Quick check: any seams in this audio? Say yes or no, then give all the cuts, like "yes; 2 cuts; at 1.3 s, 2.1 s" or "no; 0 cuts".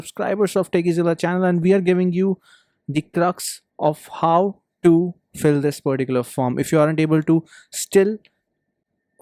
no; 0 cuts